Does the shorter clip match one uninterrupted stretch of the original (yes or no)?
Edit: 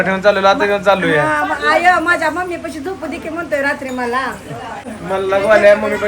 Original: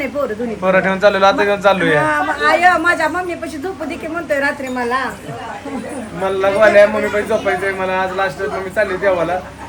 no